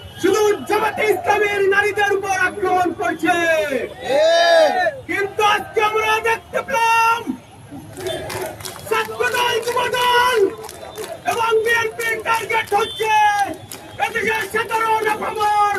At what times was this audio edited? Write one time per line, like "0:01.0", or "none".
none